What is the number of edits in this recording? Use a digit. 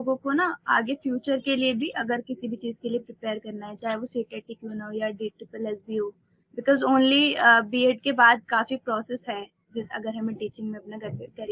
0